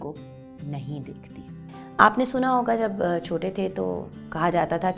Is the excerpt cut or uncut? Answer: cut